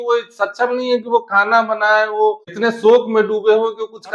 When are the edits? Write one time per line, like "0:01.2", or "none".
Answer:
0:02.5